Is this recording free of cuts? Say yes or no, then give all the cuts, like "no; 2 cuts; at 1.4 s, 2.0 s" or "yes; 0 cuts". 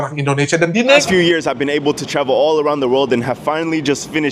no; 1 cut; at 1.0 s